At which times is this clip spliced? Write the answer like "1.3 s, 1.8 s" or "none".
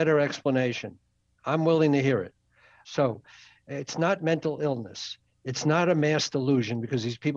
2.8 s

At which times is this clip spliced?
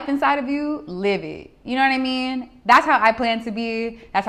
none

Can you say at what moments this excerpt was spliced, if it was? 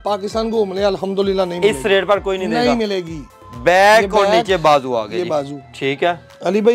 none

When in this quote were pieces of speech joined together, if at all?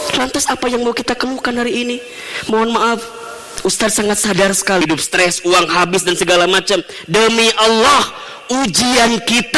4.8 s

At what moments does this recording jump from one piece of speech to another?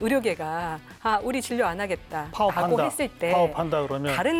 none

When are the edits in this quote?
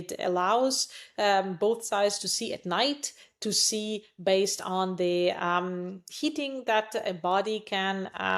none

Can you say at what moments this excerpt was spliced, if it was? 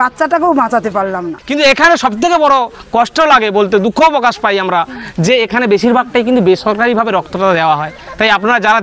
1.3 s

